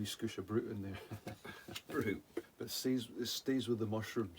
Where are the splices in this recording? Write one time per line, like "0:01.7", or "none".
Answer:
0:02.5